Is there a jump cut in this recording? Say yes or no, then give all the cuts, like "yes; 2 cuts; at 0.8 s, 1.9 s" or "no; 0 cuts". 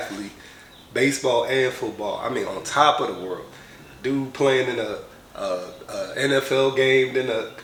no; 0 cuts